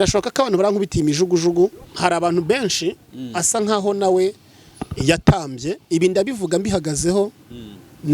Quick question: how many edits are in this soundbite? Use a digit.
1